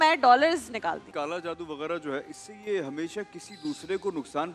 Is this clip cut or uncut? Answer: cut